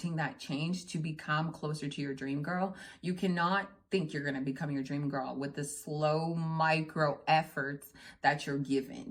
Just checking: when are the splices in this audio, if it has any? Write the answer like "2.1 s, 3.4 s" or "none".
none